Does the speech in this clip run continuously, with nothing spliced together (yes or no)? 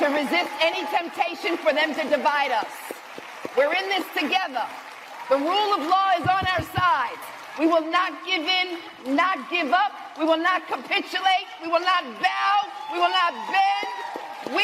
yes